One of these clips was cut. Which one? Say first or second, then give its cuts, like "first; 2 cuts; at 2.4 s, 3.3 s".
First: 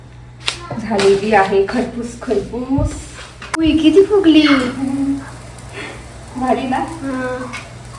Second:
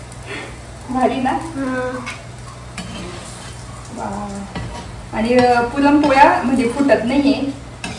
first; 1 cut; at 3.6 s